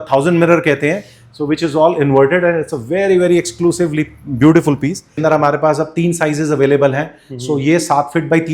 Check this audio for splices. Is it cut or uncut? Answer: cut